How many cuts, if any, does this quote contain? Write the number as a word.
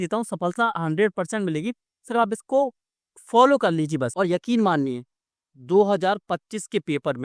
one